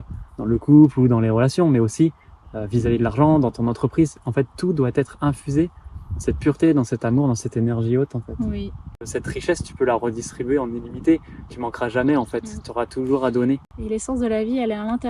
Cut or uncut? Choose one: cut